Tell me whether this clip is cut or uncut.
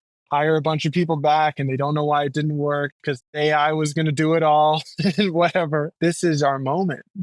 cut